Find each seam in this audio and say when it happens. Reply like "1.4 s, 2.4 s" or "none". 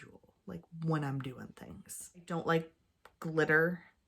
2.3 s